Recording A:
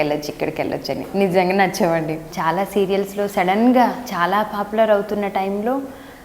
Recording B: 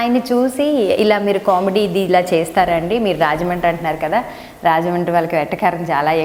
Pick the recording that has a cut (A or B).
A